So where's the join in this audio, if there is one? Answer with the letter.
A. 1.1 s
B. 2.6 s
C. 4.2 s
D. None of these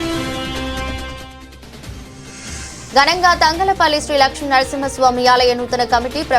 D